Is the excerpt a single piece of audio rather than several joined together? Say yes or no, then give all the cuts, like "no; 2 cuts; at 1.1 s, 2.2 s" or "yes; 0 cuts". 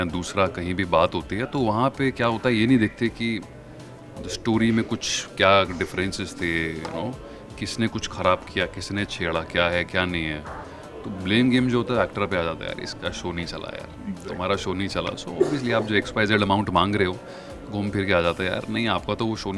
yes; 0 cuts